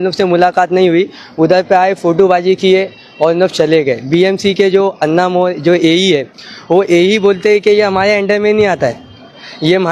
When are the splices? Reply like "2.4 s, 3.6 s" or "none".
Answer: none